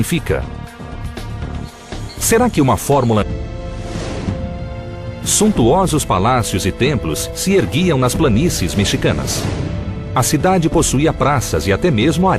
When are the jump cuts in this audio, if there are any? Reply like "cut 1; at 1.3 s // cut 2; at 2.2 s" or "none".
none

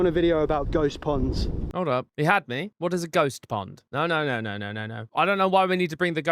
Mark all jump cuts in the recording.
cut 1; at 1.7 s // cut 2; at 5.1 s

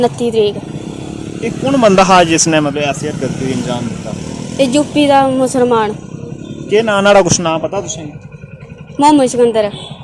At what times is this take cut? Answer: none

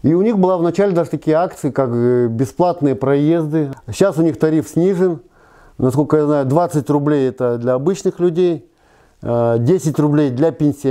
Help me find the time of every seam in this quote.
cut 1; at 3.7 s

